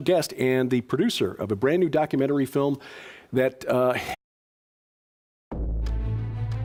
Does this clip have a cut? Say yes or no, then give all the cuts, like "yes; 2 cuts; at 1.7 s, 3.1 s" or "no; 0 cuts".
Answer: no; 0 cuts